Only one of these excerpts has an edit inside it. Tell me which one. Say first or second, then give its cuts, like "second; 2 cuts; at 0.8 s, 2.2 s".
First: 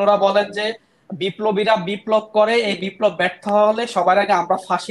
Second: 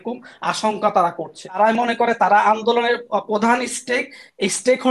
second; 1 cut; at 1.6 s